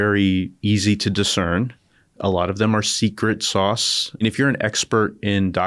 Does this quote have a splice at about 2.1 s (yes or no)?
no